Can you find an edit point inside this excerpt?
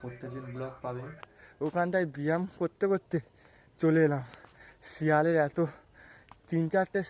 yes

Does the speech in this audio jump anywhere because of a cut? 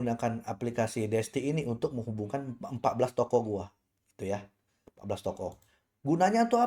no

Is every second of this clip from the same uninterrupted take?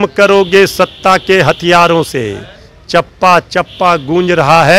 yes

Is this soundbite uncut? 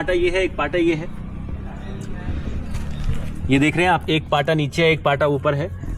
yes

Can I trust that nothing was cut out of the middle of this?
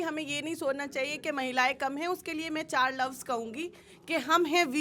yes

